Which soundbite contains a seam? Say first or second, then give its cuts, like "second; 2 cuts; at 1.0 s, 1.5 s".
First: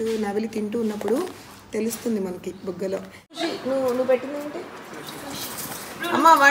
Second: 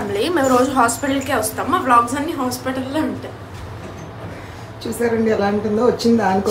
first; 1 cut; at 3.4 s